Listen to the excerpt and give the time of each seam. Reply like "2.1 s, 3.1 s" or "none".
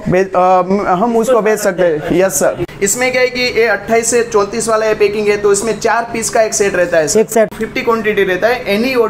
2.7 s, 7.4 s